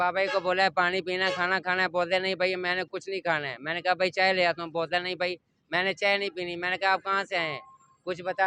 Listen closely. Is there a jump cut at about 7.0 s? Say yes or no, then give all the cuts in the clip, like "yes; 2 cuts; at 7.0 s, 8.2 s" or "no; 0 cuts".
no; 0 cuts